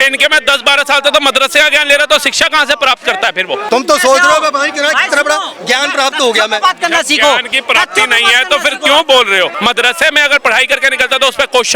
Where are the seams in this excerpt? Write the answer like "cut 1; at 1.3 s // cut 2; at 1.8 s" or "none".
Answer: cut 1; at 3.7 s // cut 2; at 9.5 s